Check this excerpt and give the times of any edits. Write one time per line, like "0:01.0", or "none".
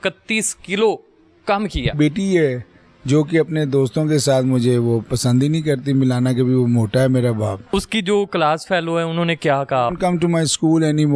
0:01.9
0:07.7
0:09.9